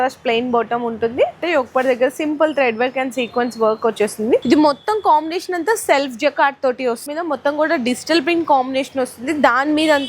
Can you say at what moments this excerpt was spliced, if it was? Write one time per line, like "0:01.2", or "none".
0:01.4
0:04.4
0:07.1